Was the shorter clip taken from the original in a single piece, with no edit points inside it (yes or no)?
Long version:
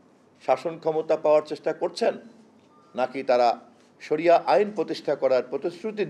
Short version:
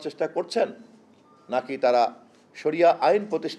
yes